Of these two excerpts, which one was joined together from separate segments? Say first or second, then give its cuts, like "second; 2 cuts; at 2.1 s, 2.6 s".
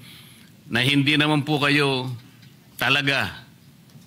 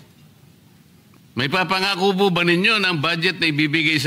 second; 1 cut; at 1.1 s